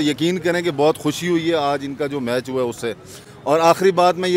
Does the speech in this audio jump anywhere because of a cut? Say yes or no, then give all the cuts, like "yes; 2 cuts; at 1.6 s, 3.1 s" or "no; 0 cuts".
no; 0 cuts